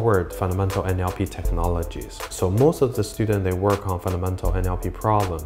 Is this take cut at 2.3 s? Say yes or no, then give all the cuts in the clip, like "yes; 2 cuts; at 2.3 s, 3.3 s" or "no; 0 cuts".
yes; 1 cut; at 2.3 s